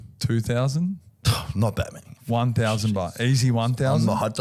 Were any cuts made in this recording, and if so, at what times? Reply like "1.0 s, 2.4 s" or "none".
none